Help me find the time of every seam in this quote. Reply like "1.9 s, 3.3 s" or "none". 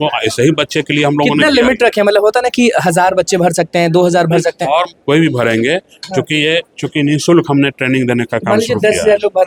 none